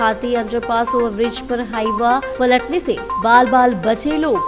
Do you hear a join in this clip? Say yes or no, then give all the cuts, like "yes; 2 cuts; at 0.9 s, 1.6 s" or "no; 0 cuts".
no; 0 cuts